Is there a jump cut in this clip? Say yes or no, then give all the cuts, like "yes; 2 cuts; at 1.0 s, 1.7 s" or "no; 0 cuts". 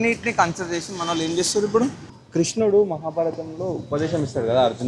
yes; 1 cut; at 2.2 s